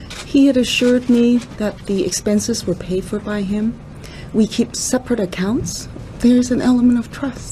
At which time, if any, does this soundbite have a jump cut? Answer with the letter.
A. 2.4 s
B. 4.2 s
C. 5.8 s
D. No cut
C